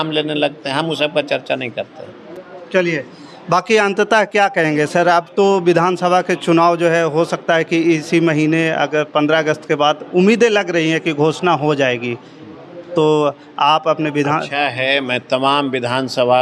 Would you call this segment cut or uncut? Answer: uncut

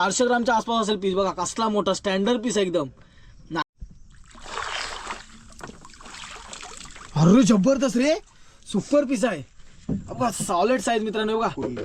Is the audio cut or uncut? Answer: cut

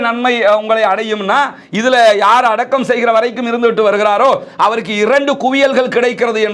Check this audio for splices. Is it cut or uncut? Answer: uncut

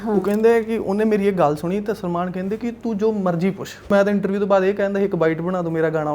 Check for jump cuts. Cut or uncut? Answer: cut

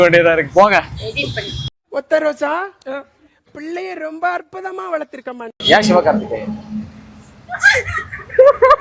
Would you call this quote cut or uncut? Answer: cut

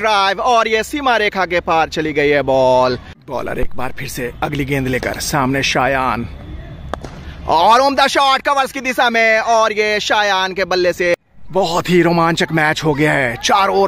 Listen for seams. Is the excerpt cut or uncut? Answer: cut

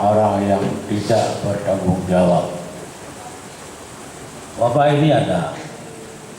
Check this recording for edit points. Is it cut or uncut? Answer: cut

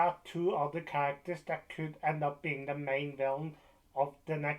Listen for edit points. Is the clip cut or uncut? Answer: uncut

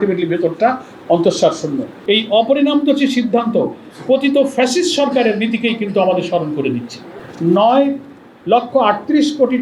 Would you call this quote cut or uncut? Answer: cut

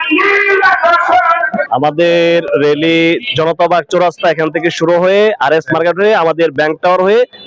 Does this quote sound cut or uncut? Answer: cut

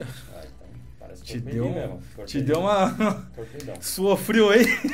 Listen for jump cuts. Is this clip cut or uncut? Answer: uncut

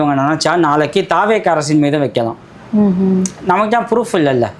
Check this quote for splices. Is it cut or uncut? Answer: uncut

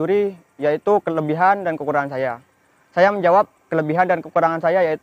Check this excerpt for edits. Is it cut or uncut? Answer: uncut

